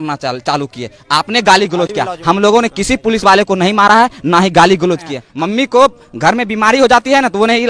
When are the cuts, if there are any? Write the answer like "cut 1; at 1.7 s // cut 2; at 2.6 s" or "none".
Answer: cut 1; at 5.2 s

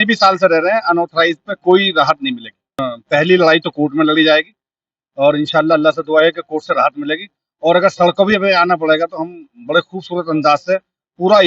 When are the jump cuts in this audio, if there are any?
cut 1; at 2.9 s

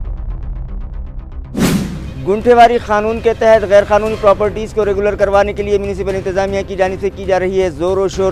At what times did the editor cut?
cut 1; at 1.6 s

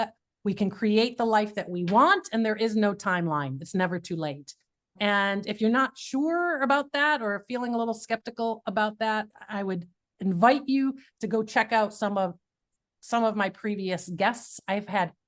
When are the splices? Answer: cut 1; at 4.9 s // cut 2; at 9.3 s

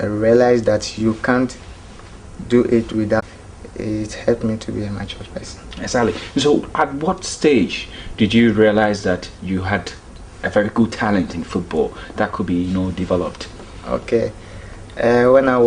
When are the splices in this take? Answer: cut 1; at 3.2 s

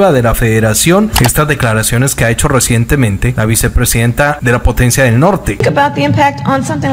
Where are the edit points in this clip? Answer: cut 1; at 1.2 s // cut 2; at 3.3 s // cut 3; at 4.4 s // cut 4; at 5.7 s

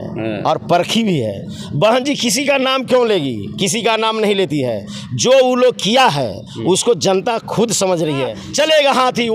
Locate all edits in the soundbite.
cut 1; at 8.4 s

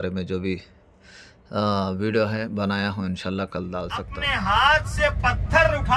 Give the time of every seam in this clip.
cut 1; at 4.1 s

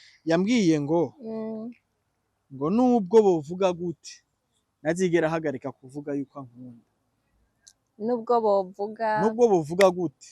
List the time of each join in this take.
none

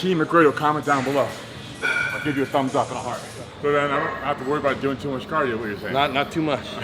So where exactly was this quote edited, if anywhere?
cut 1; at 3.5 s

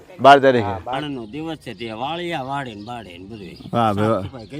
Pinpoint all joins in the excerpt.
cut 1; at 1.0 s

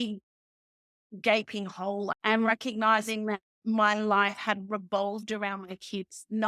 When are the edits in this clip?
cut 1; at 2.1 s

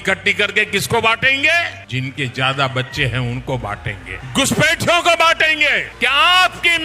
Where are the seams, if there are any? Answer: cut 1; at 1.8 s // cut 2; at 4.1 s // cut 3; at 5.9 s

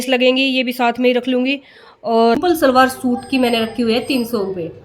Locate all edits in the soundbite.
cut 1; at 2.4 s

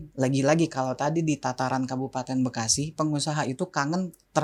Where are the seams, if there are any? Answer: none

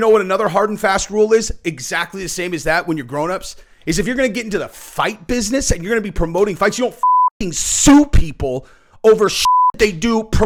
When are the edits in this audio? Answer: none

